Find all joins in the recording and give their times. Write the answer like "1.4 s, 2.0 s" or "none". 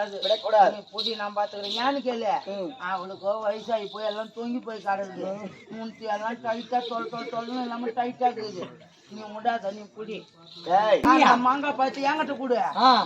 11.0 s